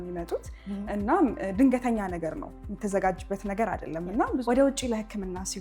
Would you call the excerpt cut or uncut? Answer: uncut